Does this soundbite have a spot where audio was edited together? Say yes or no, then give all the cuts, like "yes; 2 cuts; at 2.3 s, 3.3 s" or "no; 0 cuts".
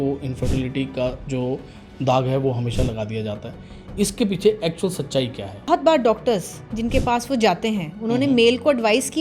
yes; 1 cut; at 5.6 s